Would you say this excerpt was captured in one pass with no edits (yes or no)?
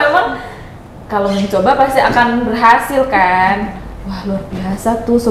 yes